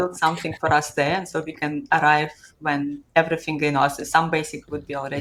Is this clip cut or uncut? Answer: uncut